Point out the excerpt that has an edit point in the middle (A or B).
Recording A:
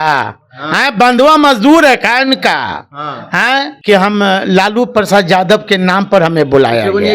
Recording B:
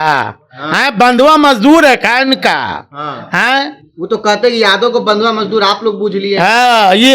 A